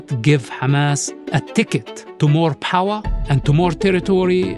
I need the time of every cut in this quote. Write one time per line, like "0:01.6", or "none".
0:01.1
0:02.0